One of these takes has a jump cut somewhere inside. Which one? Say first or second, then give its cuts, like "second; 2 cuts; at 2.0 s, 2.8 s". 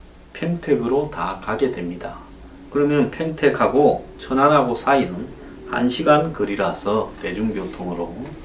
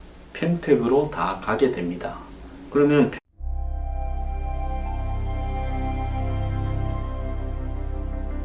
first; 1 cut; at 3.3 s